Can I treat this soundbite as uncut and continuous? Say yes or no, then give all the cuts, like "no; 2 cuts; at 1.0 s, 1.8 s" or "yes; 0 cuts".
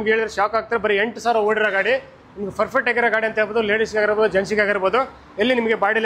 yes; 0 cuts